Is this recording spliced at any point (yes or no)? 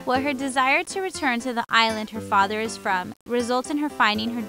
no